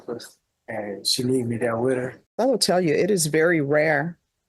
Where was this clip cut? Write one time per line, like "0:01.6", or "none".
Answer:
0:02.2